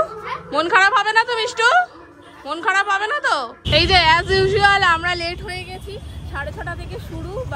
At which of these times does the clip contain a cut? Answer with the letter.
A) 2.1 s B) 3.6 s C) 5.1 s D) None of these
B